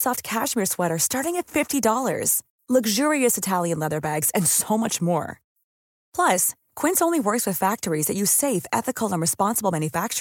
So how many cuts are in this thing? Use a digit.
0